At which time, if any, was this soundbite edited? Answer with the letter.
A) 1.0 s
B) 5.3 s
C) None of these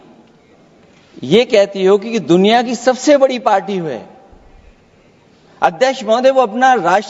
C